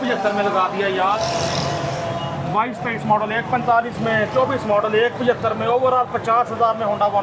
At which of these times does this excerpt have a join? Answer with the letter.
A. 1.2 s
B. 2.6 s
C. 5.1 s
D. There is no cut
A